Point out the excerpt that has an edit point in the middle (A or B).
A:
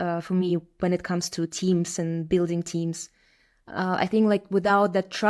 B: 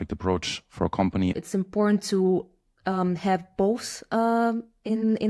B